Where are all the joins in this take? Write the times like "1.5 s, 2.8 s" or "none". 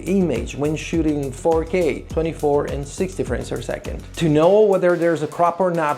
4.0 s